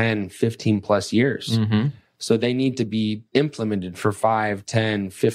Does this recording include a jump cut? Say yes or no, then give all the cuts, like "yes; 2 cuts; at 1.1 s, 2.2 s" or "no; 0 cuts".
yes; 1 cut; at 3.2 s